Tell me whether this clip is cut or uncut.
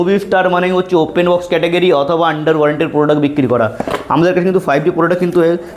uncut